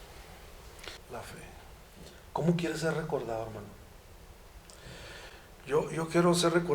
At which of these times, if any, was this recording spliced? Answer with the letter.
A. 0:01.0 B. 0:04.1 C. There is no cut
A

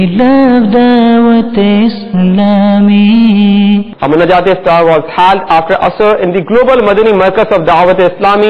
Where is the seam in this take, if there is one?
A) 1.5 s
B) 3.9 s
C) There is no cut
B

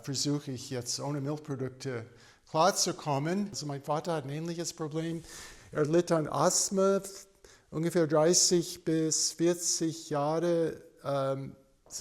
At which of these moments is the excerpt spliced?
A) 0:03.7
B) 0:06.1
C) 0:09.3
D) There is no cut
A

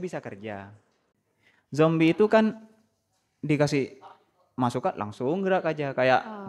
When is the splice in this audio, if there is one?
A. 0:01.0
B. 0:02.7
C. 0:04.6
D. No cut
A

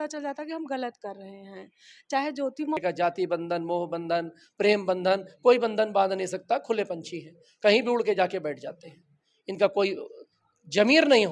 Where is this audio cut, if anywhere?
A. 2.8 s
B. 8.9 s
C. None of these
A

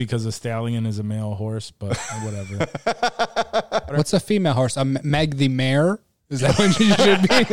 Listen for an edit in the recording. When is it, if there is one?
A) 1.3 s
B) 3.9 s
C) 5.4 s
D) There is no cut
B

